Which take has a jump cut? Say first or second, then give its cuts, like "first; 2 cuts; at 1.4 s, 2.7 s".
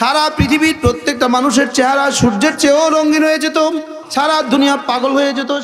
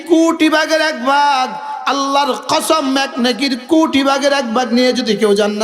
first; 1 cut; at 4.0 s